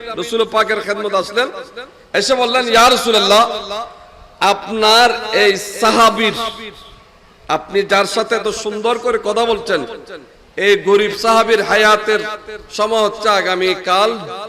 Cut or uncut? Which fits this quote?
uncut